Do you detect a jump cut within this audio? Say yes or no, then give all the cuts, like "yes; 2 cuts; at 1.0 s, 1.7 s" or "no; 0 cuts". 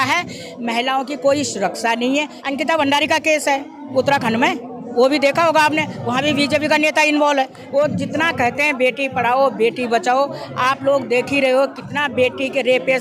yes; 2 cuts; at 2.4 s, 7.6 s